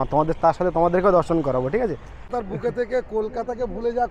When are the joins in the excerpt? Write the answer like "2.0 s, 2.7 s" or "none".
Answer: 2.3 s